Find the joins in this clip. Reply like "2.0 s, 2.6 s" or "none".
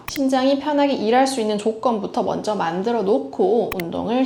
none